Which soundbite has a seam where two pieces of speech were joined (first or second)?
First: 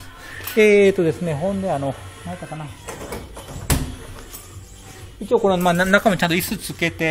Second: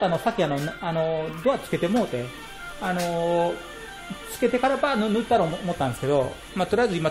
first